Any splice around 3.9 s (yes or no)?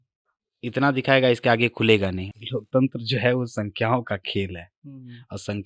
no